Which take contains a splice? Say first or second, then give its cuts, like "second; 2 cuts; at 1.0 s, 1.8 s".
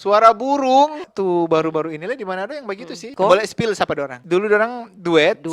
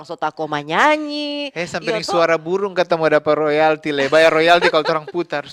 first; 3 cuts; at 1.1 s, 3.0 s, 4.1 s